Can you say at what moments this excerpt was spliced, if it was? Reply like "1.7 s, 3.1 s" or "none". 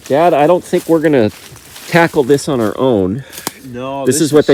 none